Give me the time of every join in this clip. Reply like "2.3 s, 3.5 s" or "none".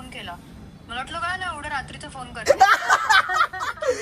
2.4 s